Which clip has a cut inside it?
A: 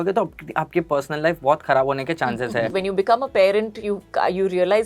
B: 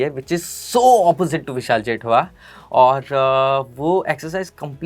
A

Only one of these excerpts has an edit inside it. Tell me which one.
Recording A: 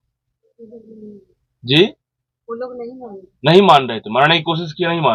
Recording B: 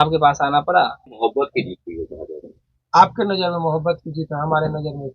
B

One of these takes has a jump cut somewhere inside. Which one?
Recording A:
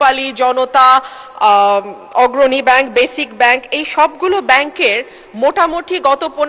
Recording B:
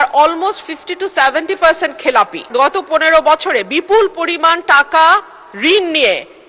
B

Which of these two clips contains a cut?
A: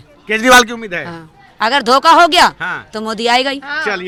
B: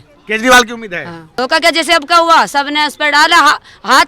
B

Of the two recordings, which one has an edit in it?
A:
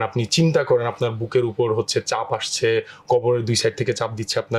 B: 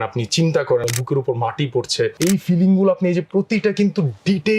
B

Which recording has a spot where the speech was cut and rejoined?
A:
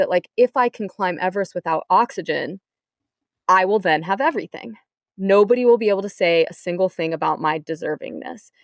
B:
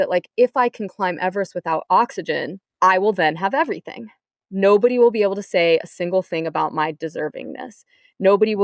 B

